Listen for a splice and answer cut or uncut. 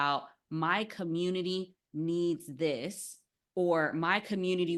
uncut